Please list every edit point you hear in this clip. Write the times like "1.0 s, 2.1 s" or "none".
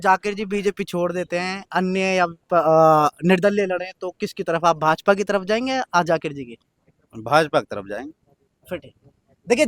none